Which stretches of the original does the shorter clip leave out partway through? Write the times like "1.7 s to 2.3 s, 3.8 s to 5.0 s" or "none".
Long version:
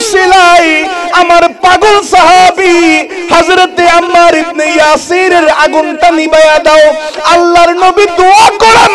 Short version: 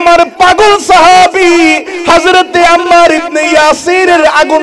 none